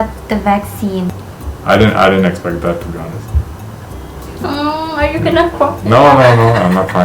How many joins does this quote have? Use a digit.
1